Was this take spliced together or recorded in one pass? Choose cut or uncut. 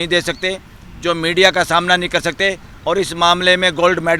cut